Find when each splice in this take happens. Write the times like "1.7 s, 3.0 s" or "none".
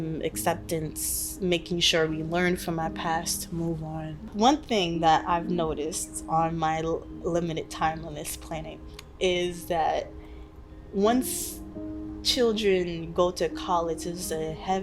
4.3 s